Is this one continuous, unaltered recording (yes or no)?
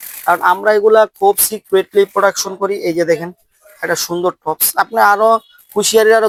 yes